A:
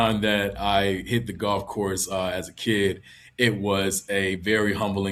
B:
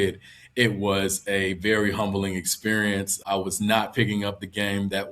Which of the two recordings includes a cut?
B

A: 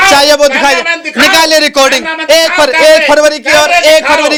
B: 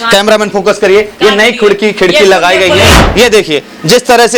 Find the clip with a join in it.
B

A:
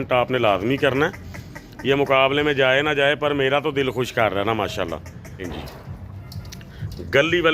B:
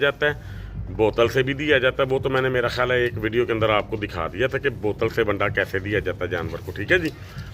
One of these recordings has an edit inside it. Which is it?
A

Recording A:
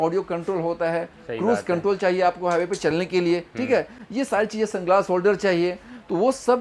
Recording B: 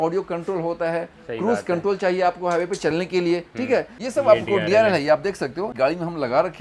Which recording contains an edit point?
B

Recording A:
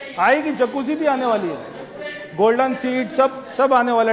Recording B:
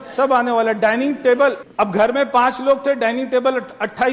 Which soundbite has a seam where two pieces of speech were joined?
B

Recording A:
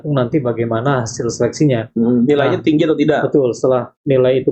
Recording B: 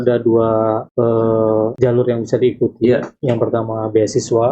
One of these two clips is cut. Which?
B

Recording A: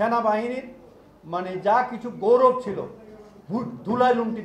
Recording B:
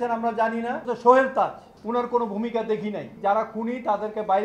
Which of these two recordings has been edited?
B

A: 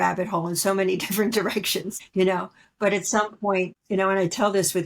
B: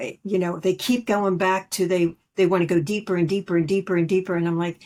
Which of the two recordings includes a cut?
A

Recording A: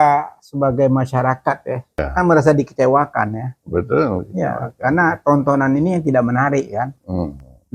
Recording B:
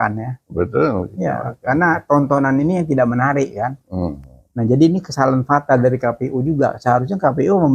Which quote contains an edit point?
A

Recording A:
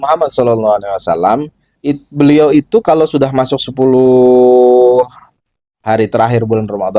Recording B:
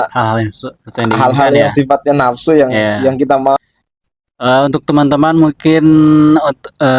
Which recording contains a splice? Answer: B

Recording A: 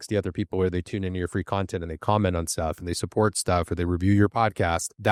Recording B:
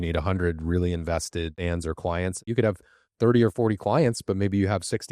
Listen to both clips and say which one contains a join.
B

